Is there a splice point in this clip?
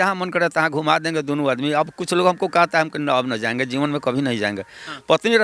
no; 0 cuts

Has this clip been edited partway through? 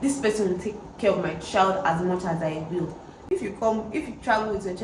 yes; 1 cut; at 3.2 s

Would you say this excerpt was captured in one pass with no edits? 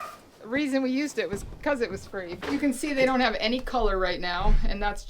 no; 1 cut; at 2.3 s

